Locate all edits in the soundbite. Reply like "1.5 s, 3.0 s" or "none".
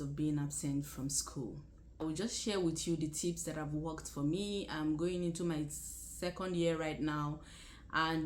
2.0 s